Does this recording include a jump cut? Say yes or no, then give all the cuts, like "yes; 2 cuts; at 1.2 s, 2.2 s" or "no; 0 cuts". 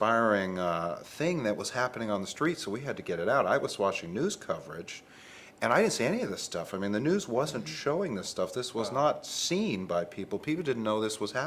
no; 0 cuts